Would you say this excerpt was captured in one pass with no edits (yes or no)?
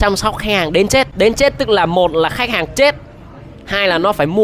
no